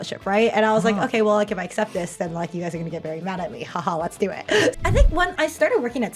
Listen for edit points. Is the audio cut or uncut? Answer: cut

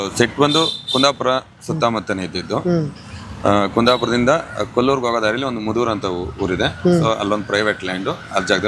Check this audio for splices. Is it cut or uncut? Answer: uncut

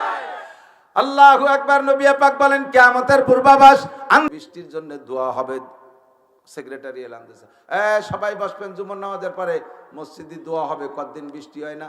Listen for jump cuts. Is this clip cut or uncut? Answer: cut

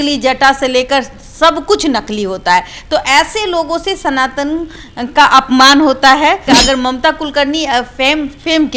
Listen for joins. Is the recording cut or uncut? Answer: cut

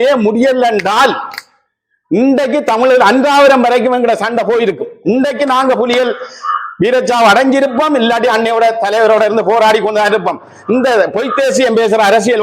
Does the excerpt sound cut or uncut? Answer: uncut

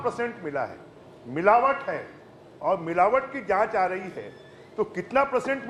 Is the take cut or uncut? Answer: uncut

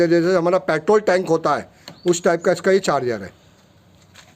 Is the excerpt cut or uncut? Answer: uncut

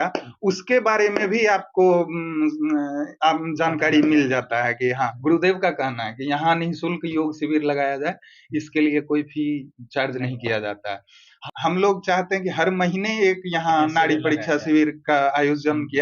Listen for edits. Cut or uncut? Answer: cut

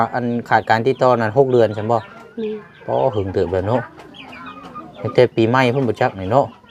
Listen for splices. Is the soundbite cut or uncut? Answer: uncut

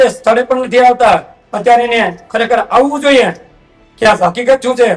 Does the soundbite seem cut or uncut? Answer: uncut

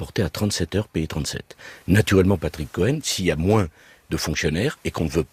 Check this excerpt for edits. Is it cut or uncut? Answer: uncut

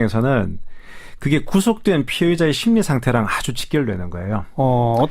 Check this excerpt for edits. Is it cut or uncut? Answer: cut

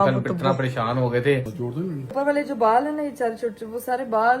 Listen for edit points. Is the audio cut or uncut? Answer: cut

